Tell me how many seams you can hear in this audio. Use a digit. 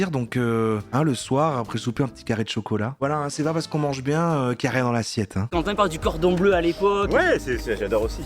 2